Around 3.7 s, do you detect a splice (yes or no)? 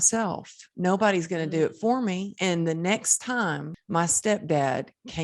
yes